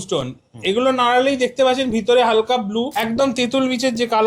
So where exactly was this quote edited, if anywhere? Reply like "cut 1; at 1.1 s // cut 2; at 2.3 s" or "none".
cut 1; at 2.9 s